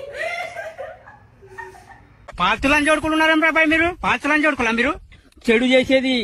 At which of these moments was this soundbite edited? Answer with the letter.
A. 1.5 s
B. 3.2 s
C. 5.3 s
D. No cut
D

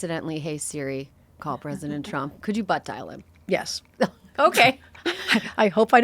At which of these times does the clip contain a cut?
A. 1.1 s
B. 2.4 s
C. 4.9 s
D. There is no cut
B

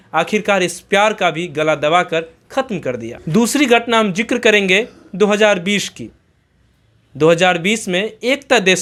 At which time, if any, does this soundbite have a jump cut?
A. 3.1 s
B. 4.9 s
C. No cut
C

